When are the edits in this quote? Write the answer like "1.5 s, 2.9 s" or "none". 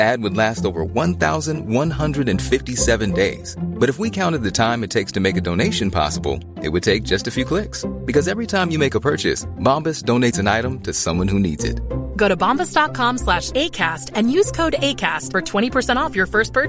none